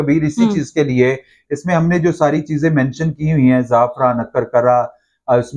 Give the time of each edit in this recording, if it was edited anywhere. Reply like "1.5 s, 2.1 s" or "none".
none